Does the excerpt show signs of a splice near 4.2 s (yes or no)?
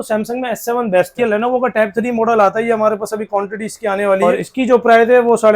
yes